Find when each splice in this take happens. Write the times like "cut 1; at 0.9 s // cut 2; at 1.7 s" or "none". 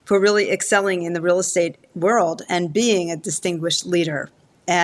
none